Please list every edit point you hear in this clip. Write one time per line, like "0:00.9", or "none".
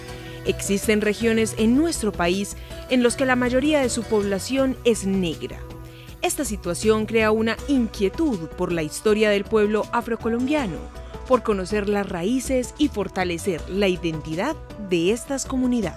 none